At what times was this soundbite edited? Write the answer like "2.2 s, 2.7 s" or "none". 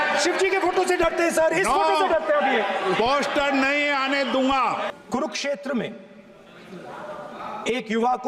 4.9 s